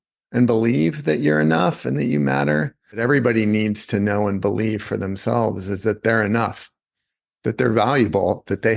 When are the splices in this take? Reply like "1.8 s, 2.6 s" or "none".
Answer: 3.0 s